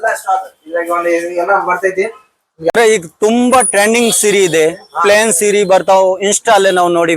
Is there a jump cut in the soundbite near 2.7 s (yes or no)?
yes